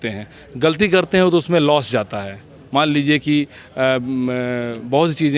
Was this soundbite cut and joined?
no; 0 cuts

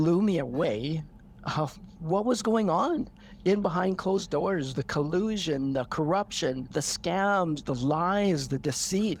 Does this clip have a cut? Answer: no; 0 cuts

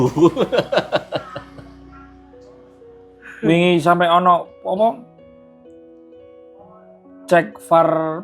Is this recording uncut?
yes; 0 cuts

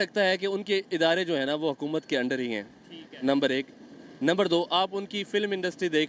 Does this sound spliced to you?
no; 0 cuts

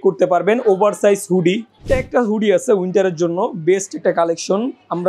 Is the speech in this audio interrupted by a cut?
yes; 1 cut; at 1.8 s

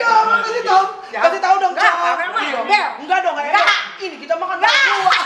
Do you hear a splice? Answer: no; 0 cuts

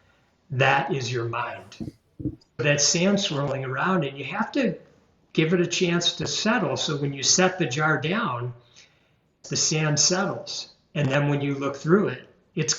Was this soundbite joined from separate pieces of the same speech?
yes; 2 cuts; at 2.6 s, 9.4 s

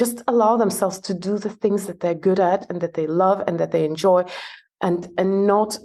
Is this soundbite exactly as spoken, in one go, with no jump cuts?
yes; 0 cuts

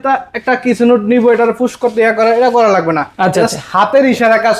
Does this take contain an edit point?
no; 0 cuts

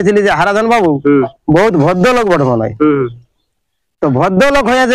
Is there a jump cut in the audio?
no; 0 cuts

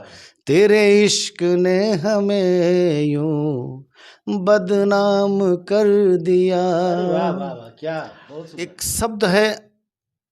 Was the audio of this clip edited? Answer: yes; 1 cut; at 8.8 s

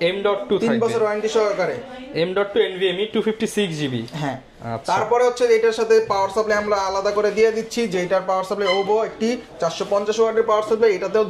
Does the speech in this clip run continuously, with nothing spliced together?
yes; 0 cuts

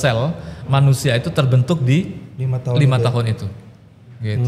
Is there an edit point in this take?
no; 0 cuts

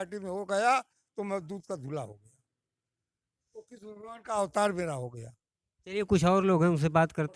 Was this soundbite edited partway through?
no; 0 cuts

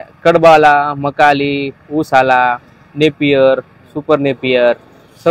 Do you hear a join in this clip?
no; 0 cuts

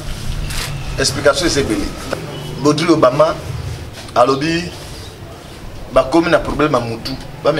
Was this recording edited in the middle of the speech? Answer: yes; 1 cut; at 2.0 s

